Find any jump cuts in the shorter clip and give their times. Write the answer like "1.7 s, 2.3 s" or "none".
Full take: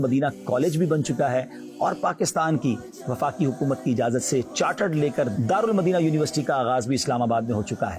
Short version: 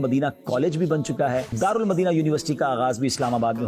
1.5 s